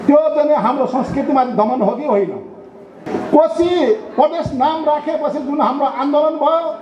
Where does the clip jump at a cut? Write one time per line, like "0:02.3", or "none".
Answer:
0:03.0

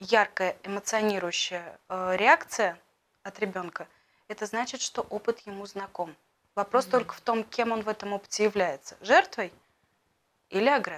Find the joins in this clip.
none

